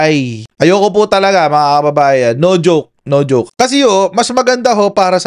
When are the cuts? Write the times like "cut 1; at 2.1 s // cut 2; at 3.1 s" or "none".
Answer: cut 1; at 3.5 s

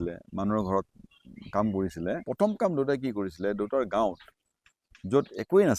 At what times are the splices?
cut 1; at 2.2 s

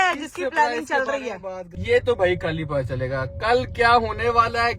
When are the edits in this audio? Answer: cut 1; at 1.7 s

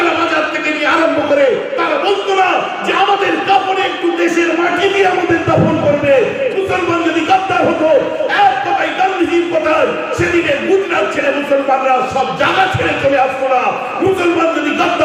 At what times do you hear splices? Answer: none

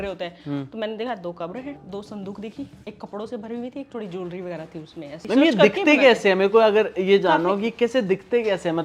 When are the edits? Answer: cut 1; at 1.8 s // cut 2; at 2.8 s // cut 3; at 5.2 s

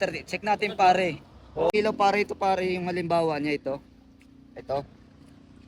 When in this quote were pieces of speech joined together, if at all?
cut 1; at 1.7 s

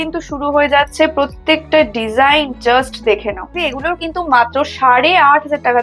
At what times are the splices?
cut 1; at 3.7 s

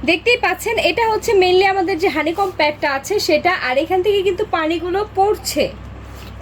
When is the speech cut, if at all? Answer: none

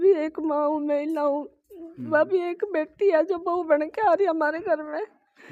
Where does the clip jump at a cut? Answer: none

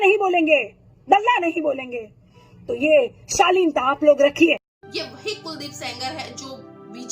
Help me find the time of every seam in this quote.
cut 1; at 4.8 s

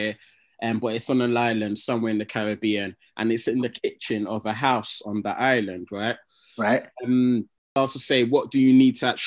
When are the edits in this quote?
cut 1; at 7.7 s

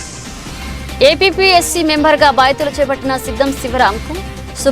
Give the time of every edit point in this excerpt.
cut 1; at 1.0 s

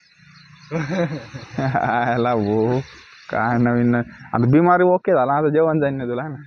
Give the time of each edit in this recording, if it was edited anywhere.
none

